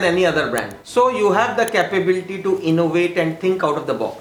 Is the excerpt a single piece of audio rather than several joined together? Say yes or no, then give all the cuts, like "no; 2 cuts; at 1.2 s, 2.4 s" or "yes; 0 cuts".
yes; 0 cuts